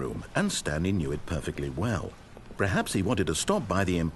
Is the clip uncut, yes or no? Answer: yes